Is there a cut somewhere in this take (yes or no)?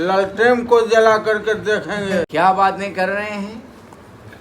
yes